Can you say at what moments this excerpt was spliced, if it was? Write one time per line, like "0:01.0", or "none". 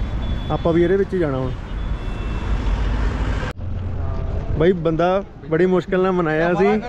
0:03.5